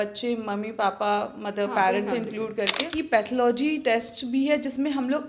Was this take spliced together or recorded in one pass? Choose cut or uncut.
cut